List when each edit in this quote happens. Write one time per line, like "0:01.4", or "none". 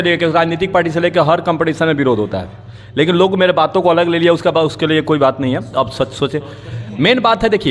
none